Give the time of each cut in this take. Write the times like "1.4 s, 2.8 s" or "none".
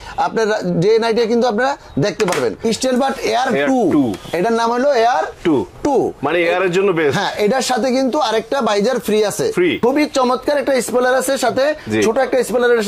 2.6 s, 9.8 s